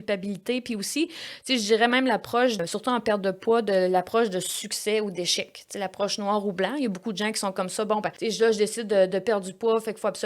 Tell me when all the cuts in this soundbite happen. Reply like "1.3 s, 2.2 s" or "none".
2.6 s, 8.2 s